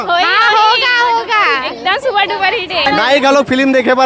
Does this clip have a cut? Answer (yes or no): yes